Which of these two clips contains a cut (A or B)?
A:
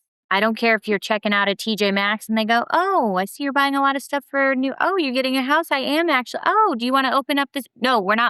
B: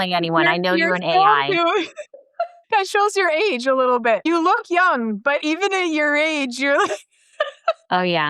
B